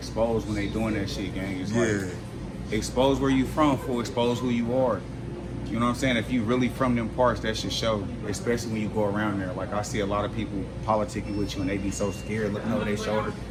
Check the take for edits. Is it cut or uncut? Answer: uncut